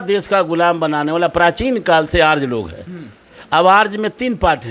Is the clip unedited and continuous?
yes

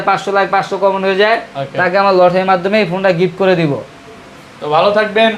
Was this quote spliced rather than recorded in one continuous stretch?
no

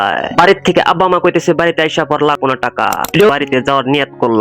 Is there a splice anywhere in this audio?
yes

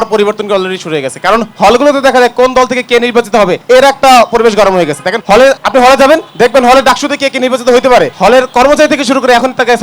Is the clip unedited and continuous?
no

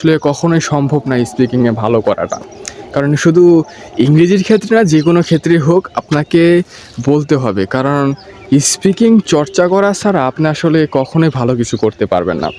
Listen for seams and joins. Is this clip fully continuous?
yes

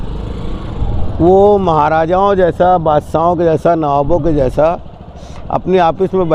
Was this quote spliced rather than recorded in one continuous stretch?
no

